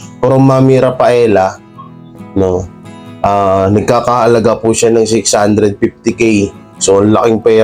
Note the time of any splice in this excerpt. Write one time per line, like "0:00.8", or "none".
0:06.7